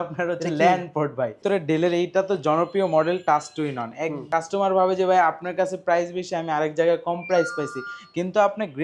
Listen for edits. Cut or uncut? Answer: cut